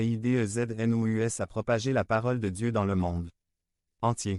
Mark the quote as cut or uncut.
uncut